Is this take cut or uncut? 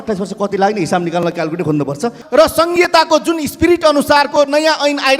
cut